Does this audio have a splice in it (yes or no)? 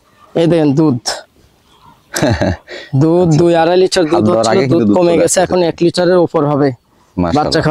no